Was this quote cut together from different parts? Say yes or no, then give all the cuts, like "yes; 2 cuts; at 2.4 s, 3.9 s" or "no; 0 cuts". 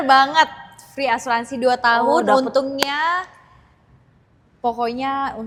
no; 0 cuts